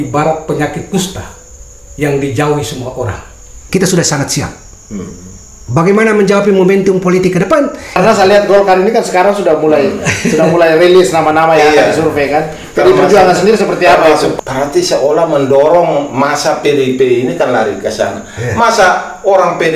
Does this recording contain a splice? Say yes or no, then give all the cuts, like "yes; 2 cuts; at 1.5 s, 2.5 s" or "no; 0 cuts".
yes; 3 cuts; at 3.6 s, 8.0 s, 14.3 s